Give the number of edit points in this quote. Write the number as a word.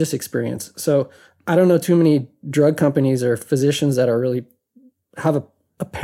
zero